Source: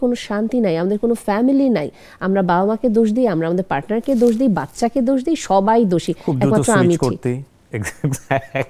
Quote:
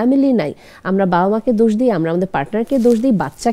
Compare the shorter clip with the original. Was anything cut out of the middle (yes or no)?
no